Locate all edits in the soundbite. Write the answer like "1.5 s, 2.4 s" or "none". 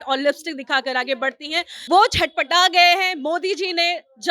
1.9 s